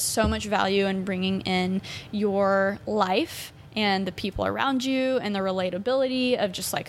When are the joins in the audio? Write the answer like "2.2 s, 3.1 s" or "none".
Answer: none